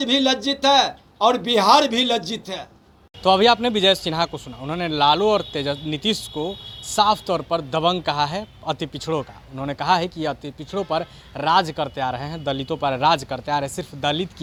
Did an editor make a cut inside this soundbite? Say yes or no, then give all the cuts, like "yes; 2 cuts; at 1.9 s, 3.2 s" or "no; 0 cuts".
no; 0 cuts